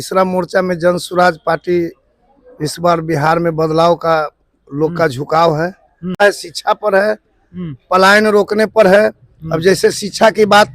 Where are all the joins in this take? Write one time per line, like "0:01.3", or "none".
0:06.2